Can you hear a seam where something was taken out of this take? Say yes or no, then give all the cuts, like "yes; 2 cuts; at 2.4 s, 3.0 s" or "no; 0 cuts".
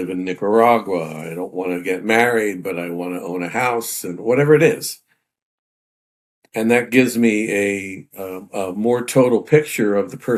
no; 0 cuts